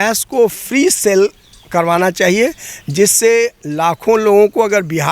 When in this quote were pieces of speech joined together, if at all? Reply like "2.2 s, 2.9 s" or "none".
none